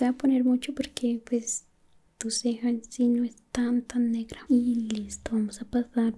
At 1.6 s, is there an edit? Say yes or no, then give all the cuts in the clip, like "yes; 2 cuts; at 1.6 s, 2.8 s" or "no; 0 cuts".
no; 1 cut; at 4.3 s